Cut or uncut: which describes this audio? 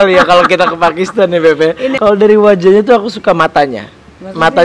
cut